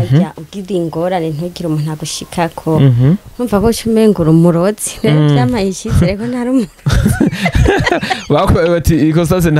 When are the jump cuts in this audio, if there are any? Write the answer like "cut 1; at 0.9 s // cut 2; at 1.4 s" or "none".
none

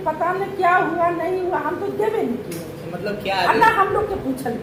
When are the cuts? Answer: none

